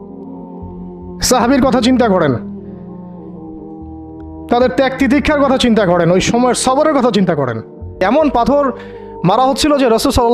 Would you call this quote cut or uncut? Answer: cut